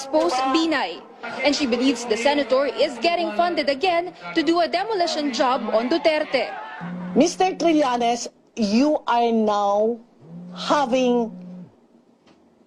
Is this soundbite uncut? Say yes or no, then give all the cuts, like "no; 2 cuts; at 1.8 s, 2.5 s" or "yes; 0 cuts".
no; 1 cut; at 11.6 s